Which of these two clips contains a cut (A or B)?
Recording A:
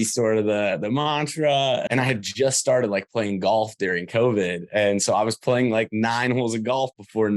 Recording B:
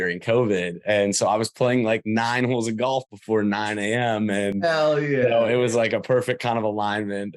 A